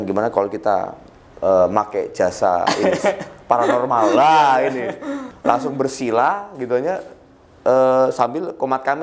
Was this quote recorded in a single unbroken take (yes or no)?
no